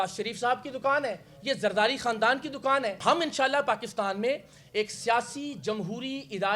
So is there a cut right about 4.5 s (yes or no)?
no